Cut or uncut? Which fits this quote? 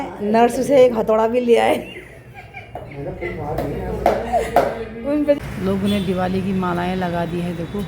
cut